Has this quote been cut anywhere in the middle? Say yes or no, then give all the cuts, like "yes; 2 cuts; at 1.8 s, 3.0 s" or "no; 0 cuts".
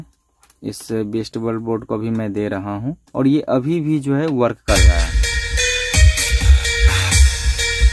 yes; 1 cut; at 3.0 s